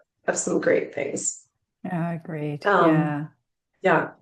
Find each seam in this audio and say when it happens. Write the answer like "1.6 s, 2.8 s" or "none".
none